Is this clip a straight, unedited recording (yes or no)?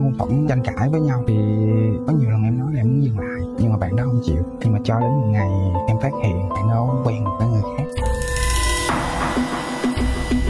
yes